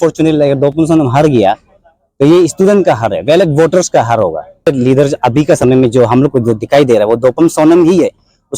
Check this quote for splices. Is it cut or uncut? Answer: cut